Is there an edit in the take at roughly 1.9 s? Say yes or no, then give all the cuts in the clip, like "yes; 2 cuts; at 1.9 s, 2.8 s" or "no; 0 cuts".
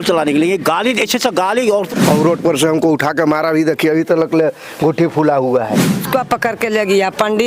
yes; 2 cuts; at 1.9 s, 6.1 s